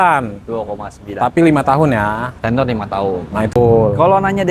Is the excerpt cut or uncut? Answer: cut